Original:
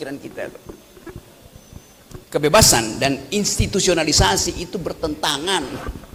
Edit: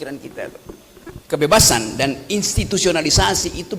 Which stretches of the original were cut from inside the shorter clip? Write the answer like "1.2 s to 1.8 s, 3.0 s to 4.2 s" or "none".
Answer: 1.2 s to 2.2 s